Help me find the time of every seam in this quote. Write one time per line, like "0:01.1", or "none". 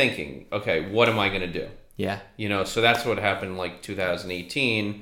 none